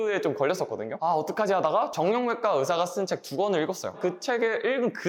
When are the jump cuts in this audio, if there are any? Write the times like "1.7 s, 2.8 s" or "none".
1.0 s, 4.0 s